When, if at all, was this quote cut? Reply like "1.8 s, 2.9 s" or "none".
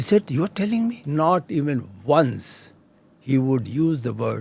1.0 s